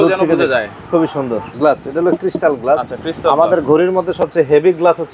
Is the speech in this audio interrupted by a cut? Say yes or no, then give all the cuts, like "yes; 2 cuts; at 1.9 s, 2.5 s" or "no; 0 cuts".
yes; 1 cut; at 1.4 s